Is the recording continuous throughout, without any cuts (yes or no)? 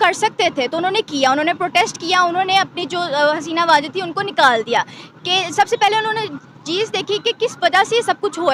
yes